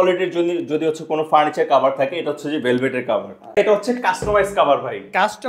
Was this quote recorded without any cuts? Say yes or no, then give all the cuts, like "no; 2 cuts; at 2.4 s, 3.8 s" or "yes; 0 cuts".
no; 1 cut; at 3.6 s